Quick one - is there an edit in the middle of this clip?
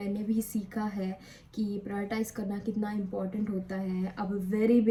no; 0 cuts

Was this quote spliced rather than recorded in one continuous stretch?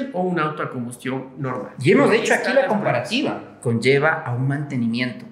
yes; 1 cut; at 3.5 s

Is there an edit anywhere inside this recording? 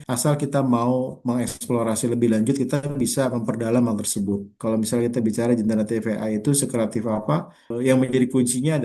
yes; 2 cuts; at 4.5 s, 7.7 s

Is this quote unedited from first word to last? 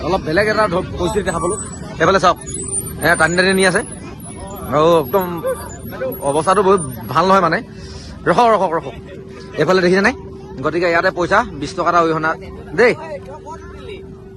yes; 0 cuts

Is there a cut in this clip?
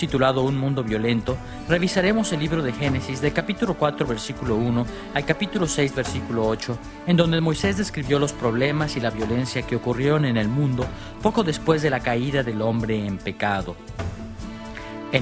no; 0 cuts

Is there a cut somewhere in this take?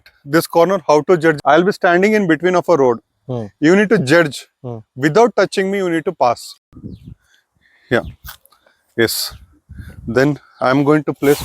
yes; 2 cuts; at 1.4 s, 6.5 s

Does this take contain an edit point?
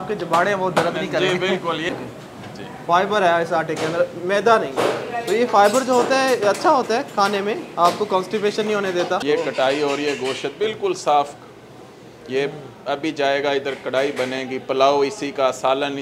yes; 2 cuts; at 1.9 s, 9.2 s

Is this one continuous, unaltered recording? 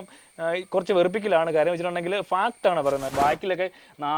no; 1 cut; at 3.1 s

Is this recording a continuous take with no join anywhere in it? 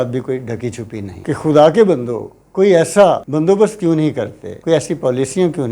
no; 1 cut; at 1.1 s

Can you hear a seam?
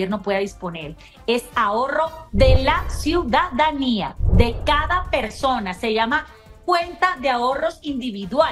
no; 0 cuts

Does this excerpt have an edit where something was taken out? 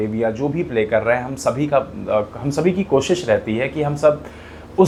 no; 0 cuts

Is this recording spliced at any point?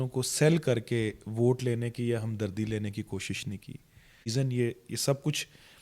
yes; 1 cut; at 4.3 s

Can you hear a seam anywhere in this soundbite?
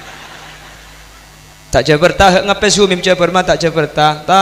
no; 0 cuts

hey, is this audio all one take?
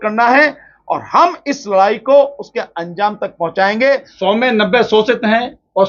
no; 1 cut; at 4.1 s

